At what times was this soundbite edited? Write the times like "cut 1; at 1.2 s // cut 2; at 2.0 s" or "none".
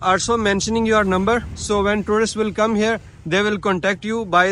none